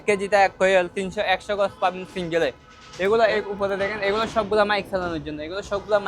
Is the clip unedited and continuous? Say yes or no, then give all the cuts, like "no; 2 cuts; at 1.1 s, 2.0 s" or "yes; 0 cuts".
yes; 0 cuts